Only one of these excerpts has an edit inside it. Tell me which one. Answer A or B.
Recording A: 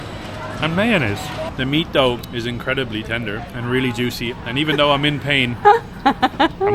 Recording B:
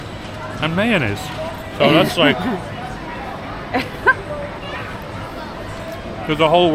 A